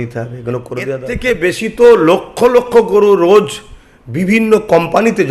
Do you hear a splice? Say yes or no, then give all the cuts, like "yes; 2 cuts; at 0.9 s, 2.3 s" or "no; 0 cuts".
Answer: yes; 1 cut; at 1.1 s